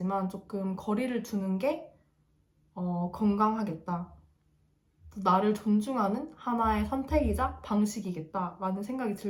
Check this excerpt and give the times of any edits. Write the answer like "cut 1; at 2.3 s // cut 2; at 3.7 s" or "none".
none